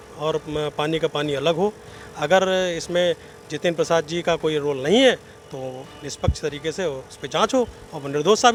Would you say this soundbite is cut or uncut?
uncut